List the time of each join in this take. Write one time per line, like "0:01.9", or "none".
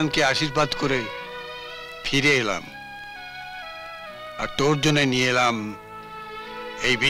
none